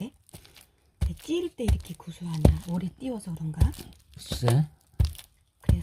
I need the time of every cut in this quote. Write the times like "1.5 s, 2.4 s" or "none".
2.6 s